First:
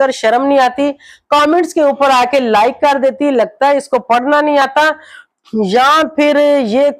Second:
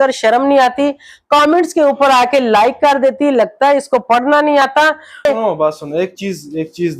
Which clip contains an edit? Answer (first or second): second